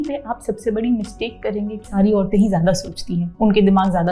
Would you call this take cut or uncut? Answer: cut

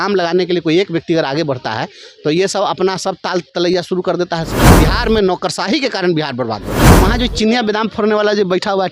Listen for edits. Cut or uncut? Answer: cut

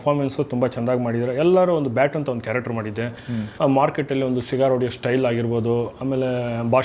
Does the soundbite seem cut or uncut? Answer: cut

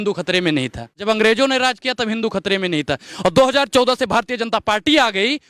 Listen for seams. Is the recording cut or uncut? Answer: cut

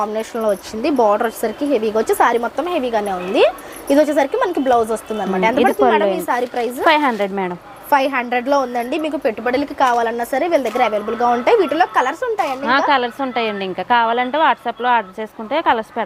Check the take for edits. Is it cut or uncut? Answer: uncut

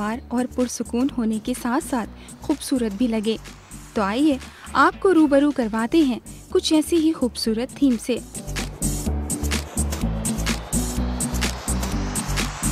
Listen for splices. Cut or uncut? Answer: cut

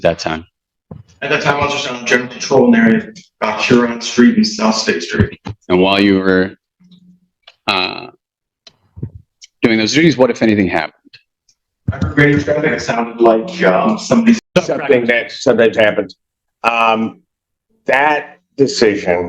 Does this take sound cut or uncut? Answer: cut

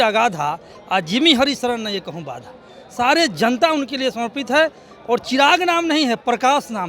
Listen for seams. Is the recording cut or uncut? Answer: uncut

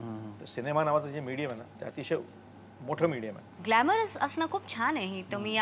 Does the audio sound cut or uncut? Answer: cut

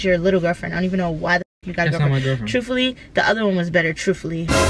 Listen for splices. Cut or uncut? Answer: uncut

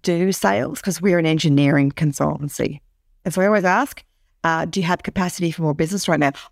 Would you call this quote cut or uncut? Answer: cut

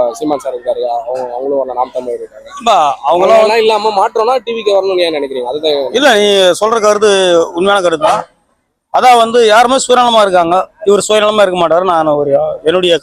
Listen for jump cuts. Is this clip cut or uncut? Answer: uncut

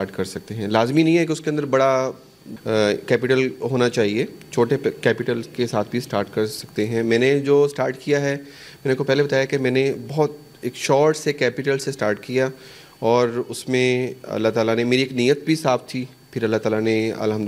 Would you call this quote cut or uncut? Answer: uncut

